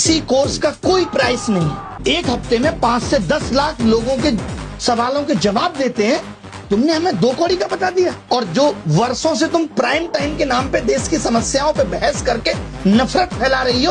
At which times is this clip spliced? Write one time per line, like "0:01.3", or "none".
0:01.9